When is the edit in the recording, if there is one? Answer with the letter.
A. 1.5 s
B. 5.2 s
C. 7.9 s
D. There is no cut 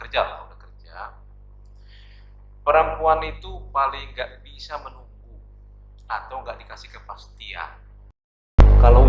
C